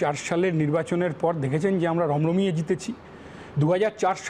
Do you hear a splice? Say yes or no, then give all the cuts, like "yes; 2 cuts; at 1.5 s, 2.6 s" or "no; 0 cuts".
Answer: no; 0 cuts